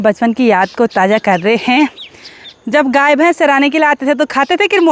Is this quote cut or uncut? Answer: uncut